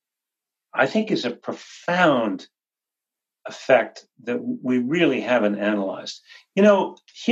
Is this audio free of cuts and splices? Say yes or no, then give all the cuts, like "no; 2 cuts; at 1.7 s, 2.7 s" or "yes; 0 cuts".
yes; 0 cuts